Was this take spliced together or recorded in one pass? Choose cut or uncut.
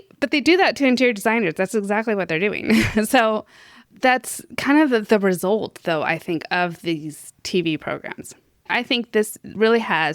cut